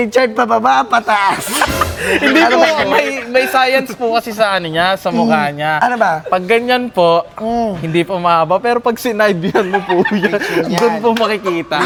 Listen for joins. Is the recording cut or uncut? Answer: uncut